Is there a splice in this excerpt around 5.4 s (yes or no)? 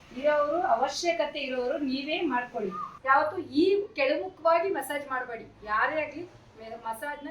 no